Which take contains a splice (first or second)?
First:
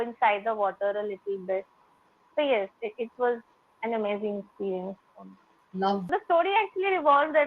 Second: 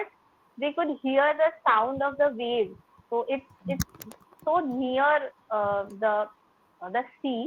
first